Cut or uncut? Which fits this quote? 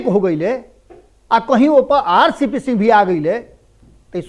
uncut